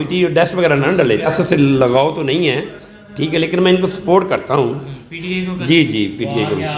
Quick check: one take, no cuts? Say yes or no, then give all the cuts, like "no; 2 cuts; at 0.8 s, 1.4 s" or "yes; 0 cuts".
no; 1 cut; at 1.3 s